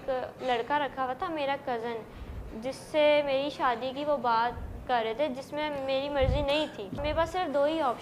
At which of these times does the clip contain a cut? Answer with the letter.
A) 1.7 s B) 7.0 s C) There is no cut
B